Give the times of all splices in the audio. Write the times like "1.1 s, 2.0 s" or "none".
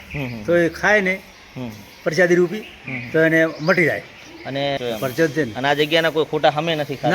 4.8 s